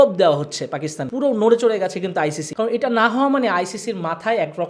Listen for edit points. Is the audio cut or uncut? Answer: cut